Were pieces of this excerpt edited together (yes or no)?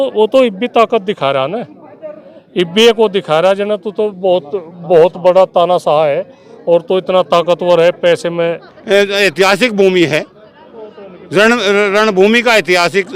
yes